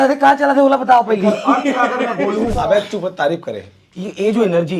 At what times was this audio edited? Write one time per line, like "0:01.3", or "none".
0:02.5